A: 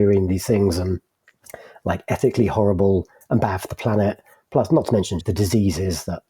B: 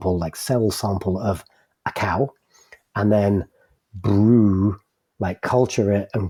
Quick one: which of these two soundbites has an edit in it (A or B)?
A